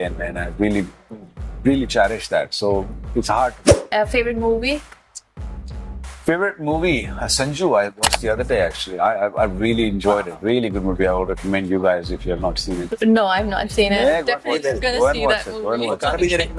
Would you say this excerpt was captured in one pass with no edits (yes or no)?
no